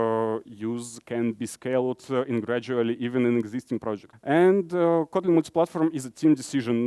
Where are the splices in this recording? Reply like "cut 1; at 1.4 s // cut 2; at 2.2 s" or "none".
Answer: cut 1; at 4.1 s